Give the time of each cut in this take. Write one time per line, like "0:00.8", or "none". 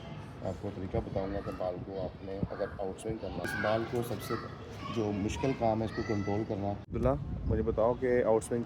0:03.5
0:06.9